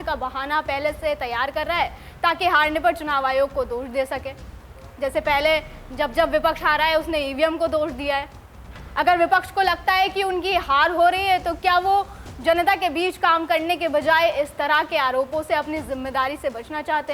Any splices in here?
no; 0 cuts

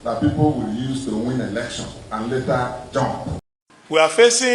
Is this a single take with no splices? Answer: no; 1 cut; at 3.4 s

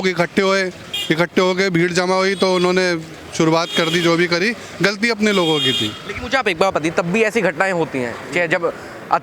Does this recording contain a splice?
no; 0 cuts

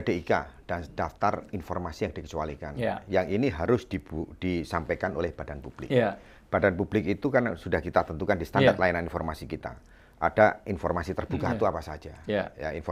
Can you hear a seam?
no; 0 cuts

